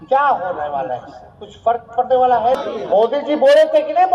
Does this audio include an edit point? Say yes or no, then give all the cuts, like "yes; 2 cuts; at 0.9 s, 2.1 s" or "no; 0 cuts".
yes; 1 cut; at 2.6 s